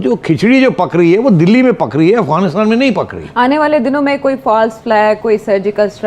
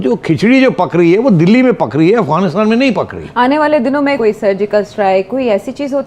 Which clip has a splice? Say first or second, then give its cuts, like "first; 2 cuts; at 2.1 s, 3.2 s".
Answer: second; 1 cut; at 4.2 s